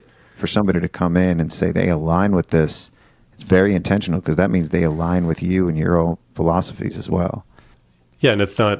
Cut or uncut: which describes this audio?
uncut